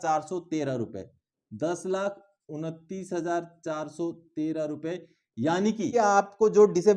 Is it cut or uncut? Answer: cut